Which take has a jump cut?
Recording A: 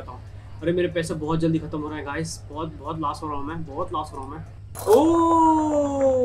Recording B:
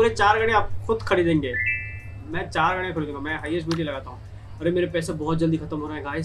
A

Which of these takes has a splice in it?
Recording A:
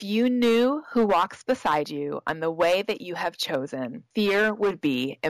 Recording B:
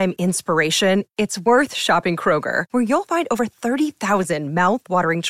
A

